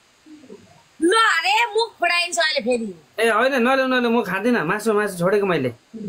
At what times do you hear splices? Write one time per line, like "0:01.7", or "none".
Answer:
none